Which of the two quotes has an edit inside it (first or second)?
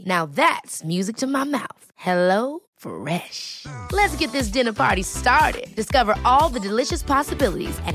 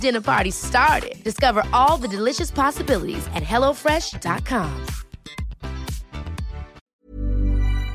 second